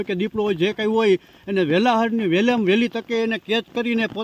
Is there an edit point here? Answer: no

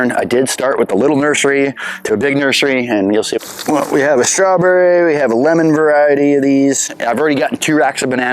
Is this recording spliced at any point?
yes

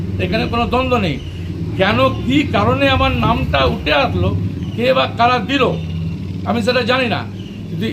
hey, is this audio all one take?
yes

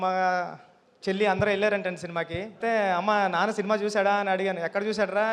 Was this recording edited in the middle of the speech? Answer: yes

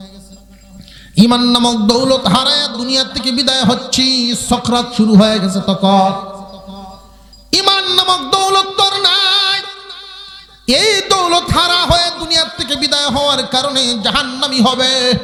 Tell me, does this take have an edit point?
no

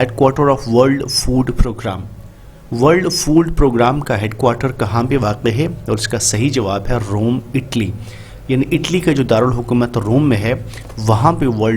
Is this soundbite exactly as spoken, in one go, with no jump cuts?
yes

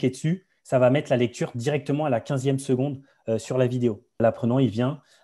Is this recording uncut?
no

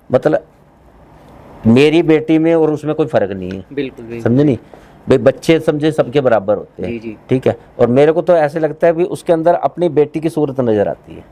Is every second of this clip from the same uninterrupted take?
yes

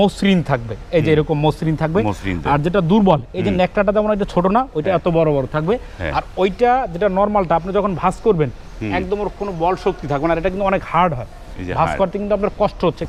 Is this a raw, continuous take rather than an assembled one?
yes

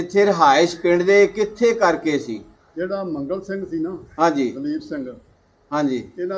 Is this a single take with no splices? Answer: no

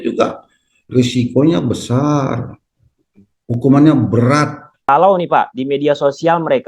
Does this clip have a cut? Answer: yes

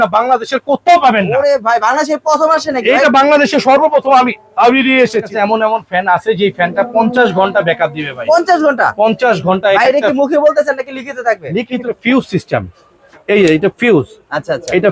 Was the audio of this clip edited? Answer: yes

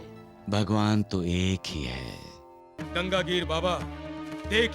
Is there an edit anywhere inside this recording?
yes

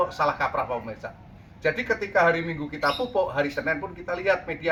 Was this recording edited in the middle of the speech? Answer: no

